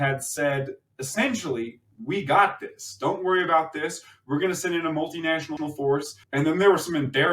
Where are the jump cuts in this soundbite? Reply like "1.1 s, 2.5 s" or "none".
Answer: 6.2 s